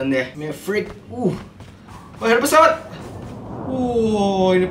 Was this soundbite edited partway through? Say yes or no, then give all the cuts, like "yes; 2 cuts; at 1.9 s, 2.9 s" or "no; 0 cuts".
no; 0 cuts